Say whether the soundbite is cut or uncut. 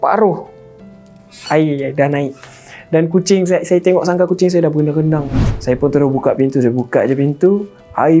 cut